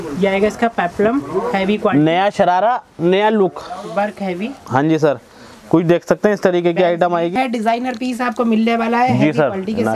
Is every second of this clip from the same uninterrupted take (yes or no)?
no